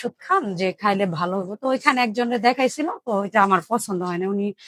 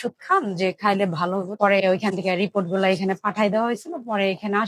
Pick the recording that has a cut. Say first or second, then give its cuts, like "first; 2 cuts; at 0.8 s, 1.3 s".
second; 1 cut; at 1.5 s